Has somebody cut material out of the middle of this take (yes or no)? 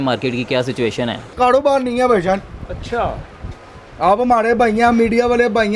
yes